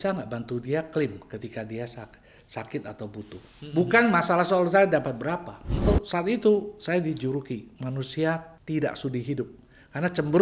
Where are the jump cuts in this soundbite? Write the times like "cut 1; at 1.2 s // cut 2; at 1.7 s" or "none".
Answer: cut 1; at 5.8 s // cut 2; at 8.5 s